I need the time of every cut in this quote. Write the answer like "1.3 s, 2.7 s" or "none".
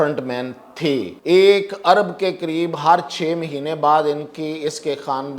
1.1 s